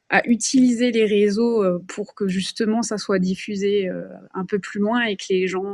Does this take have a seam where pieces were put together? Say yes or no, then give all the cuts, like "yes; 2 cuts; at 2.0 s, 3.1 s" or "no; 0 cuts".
no; 0 cuts